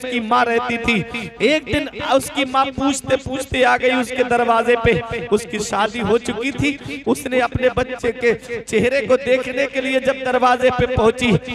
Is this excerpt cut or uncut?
uncut